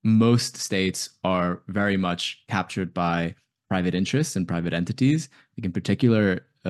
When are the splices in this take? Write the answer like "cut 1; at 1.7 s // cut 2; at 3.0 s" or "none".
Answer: none